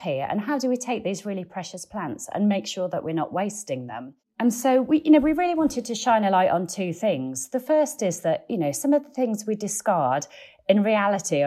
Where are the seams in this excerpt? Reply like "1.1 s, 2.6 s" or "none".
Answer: 4.3 s